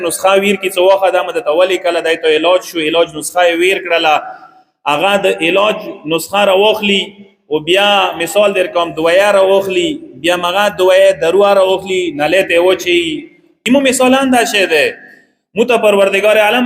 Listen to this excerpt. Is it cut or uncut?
cut